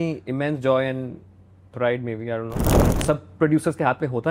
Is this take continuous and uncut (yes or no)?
no